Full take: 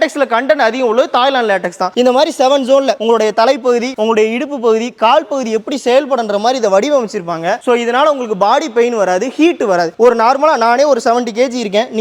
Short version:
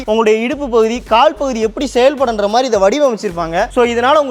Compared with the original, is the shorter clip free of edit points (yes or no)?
yes